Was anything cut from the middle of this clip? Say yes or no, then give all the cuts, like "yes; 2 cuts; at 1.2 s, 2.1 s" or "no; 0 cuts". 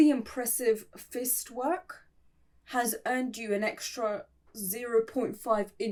no; 0 cuts